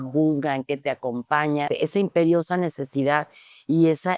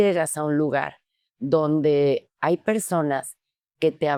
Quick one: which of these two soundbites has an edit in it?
first; 1 cut; at 1.7 s

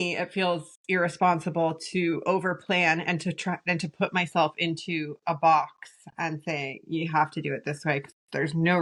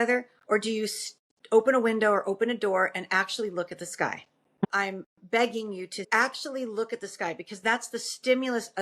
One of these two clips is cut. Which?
second; 2 cuts; at 4.6 s, 6.1 s

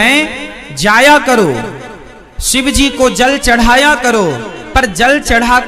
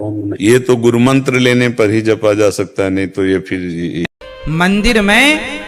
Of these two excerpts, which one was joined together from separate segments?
second; 1 cut; at 4.1 s

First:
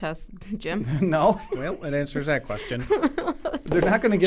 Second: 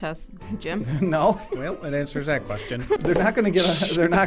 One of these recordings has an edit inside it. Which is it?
second; 1 cut; at 3.0 s

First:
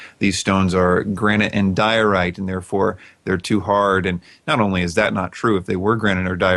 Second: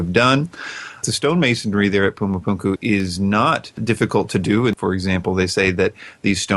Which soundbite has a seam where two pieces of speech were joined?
second; 4 cuts; at 1.0 s, 2.8 s, 3.8 s, 4.7 s

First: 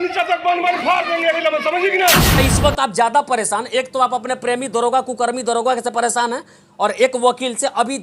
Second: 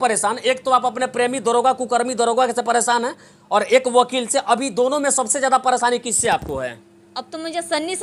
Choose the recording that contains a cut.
first; 1 cut; at 2.3 s

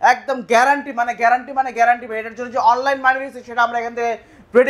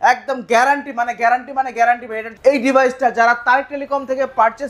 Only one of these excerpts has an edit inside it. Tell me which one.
second; 1 cut; at 2.3 s

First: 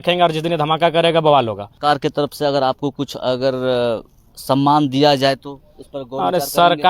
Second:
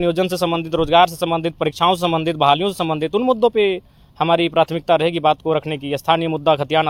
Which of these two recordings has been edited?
first; 1 cut; at 1.6 s

